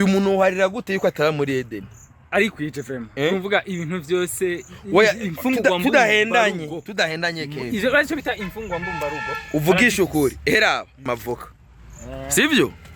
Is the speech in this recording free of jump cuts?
yes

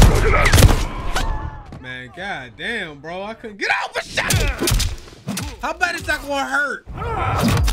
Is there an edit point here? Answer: yes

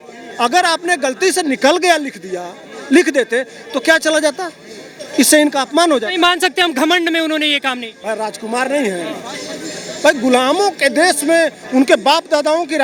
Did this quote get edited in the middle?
no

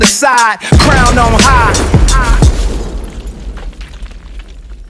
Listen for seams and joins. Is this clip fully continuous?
yes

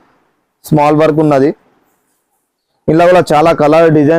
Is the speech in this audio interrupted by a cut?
no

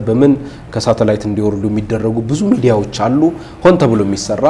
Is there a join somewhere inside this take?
no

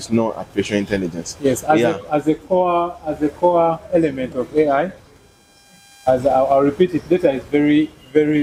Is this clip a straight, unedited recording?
yes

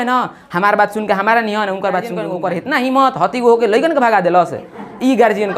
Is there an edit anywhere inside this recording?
yes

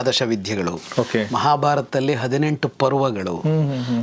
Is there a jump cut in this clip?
no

